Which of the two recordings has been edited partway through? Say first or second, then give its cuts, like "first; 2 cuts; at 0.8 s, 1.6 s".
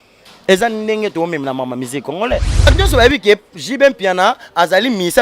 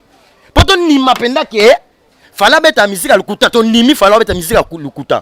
first; 1 cut; at 2.7 s